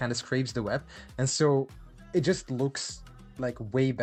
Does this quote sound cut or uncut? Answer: uncut